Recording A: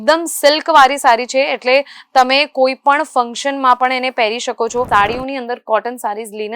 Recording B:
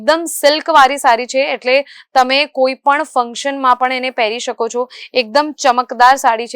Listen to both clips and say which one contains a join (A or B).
A